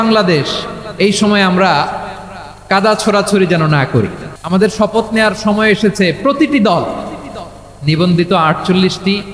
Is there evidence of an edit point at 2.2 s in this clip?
no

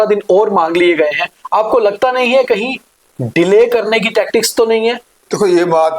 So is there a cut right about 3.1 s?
no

